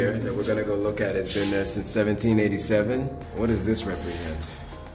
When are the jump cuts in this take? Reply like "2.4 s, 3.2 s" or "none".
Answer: 3.2 s

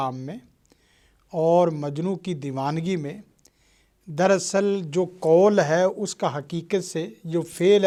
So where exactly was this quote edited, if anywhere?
none

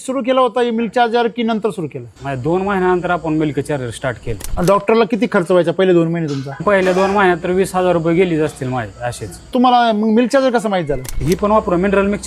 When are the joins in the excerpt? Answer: 4.4 s, 6.6 s, 9.5 s, 11.1 s

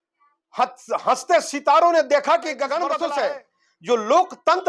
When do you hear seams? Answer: 2.9 s

